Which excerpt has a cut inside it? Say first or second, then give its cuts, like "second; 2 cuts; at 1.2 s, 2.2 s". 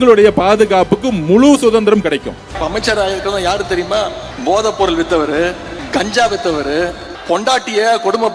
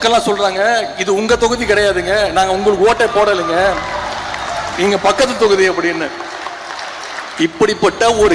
first; 4 cuts; at 2.5 s, 4.3 s, 5.7 s, 7.1 s